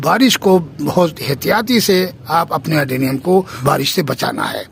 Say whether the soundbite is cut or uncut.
cut